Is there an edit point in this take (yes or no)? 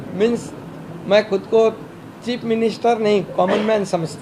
no